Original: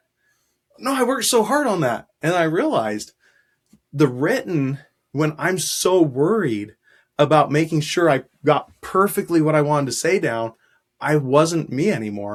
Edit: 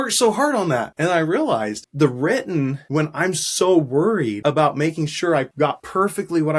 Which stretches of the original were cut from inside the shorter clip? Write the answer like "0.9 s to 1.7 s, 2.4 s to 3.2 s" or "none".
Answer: 2.0 s to 2.1 s, 3.1 s to 3.8 s, 4.8 s to 5.0 s, 6.6 s to 7.1 s, 8.4 s to 8.6 s